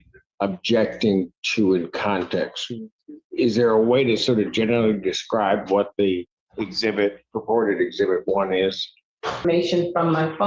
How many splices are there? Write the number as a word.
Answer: one